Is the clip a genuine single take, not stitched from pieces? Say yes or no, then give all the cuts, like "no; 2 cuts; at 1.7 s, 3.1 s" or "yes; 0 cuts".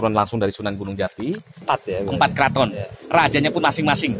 no; 1 cut; at 1.5 s